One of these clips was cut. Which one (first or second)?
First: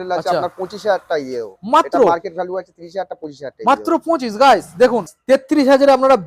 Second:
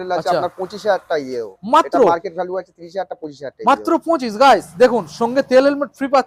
first